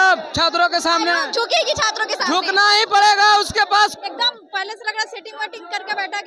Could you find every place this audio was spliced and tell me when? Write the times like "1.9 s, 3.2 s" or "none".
3.9 s